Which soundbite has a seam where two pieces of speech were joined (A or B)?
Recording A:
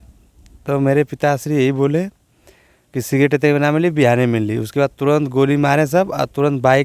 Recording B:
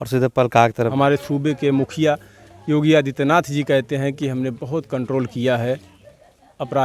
B